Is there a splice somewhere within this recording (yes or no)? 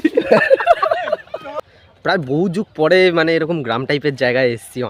yes